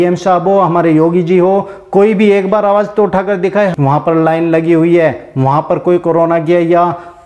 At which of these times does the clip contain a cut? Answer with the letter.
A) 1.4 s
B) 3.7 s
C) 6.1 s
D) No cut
B